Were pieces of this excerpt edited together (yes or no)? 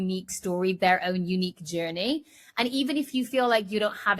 no